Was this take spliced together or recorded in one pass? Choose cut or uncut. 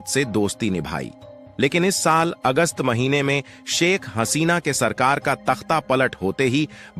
uncut